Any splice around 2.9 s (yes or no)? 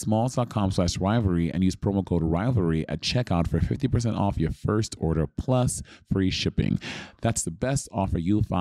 no